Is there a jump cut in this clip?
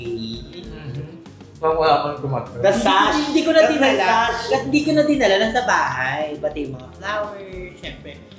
no; 0 cuts

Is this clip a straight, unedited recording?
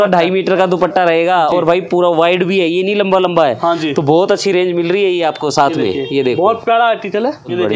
yes; 0 cuts

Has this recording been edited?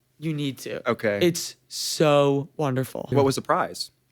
yes; 1 cut; at 3.1 s

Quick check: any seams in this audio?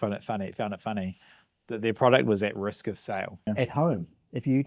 yes; 1 cut; at 3.5 s

